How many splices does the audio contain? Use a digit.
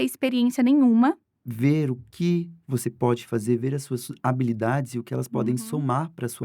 1